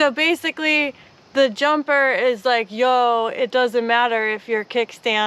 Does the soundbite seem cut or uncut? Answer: uncut